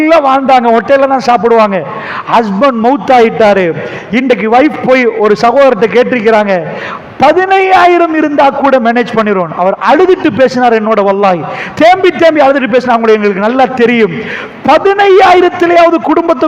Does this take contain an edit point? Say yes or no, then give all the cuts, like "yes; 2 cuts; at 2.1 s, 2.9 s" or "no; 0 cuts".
yes; 1 cut; at 11.6 s